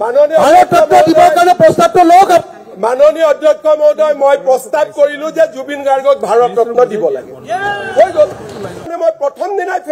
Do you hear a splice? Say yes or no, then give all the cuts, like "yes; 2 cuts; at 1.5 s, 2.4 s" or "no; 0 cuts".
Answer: yes; 1 cut; at 8.9 s